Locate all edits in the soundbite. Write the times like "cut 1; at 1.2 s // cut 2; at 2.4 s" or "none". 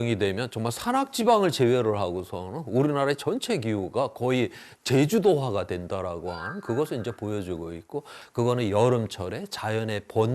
cut 1; at 8.2 s